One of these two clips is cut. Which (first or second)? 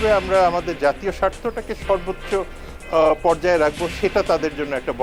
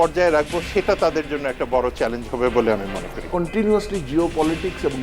second